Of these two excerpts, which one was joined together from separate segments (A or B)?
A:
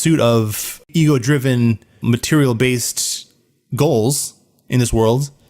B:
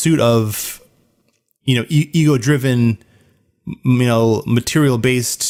A